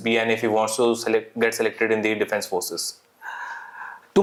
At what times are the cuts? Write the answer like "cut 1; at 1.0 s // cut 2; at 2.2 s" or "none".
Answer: none